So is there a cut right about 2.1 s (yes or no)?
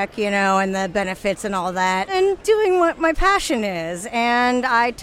yes